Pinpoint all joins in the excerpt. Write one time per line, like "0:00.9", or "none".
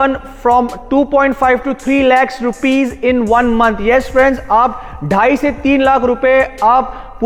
none